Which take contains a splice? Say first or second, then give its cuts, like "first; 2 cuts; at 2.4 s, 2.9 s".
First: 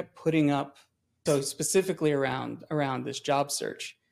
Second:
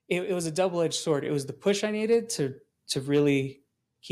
first; 1 cut; at 1.2 s